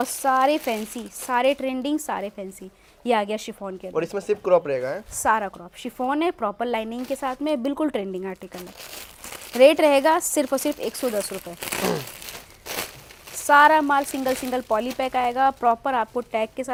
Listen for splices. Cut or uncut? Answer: uncut